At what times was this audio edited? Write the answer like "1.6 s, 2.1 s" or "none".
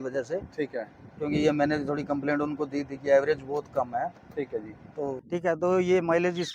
5.2 s